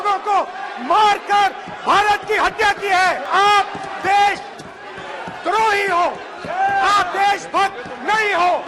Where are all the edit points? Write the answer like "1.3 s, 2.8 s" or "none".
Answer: 3.2 s